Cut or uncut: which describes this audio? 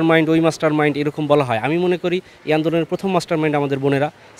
uncut